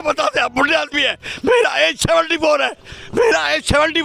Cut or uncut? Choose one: uncut